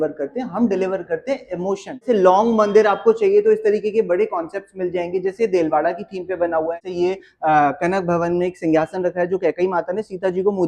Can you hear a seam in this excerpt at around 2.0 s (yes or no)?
yes